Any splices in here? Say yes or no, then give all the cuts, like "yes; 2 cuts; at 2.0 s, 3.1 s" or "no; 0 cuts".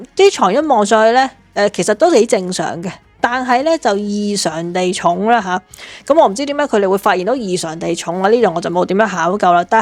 no; 0 cuts